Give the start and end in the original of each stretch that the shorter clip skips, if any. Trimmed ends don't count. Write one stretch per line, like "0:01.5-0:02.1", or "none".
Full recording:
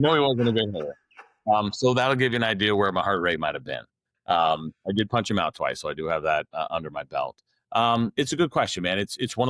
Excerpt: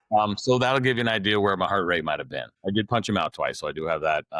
0:03.9-0:04.7

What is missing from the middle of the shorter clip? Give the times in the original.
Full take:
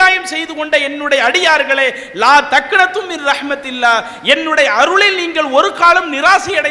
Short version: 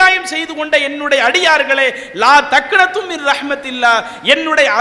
none

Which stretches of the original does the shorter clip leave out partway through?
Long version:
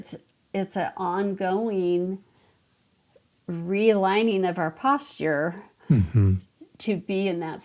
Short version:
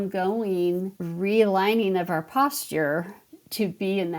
0:02.3-0:03.5
0:05.7-0:06.5

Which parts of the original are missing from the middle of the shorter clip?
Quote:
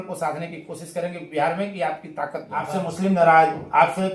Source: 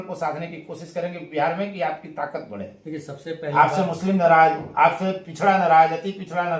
0:02.7-0:03.7

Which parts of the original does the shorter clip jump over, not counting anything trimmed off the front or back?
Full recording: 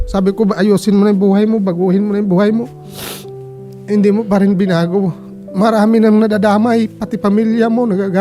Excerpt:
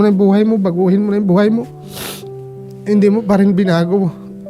none

